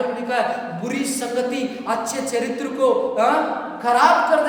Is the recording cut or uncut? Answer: uncut